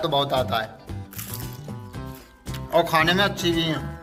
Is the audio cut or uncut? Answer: uncut